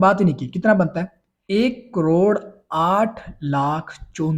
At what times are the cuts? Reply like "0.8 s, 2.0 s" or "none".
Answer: 1.4 s